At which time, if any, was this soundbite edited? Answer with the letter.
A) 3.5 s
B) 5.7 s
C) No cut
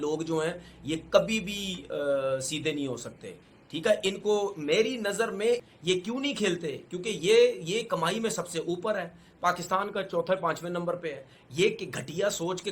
B